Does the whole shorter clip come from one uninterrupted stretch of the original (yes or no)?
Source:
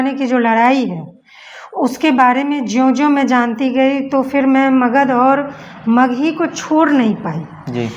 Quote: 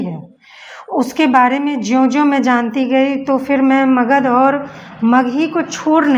yes